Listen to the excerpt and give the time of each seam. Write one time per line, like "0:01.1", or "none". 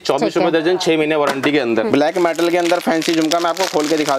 0:01.9

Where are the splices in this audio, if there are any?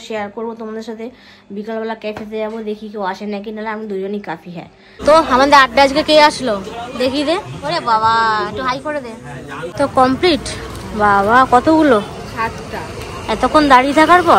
0:04.9
0:09.6

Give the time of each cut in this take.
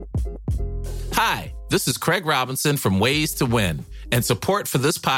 0:01.1

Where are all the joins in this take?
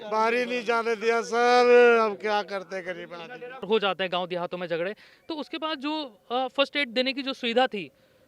0:03.6

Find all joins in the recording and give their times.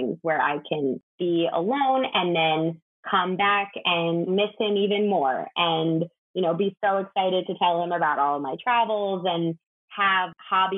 none

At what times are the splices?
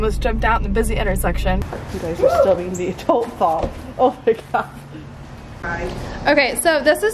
0:01.6
0:05.6

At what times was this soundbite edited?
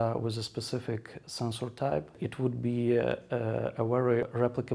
none

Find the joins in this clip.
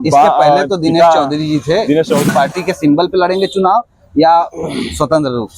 0:02.2

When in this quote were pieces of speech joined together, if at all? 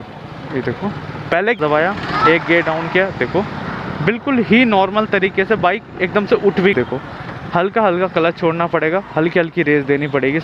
0:01.6
0:06.7

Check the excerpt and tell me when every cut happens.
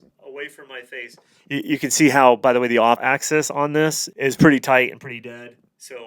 0:03.0
0:04.0

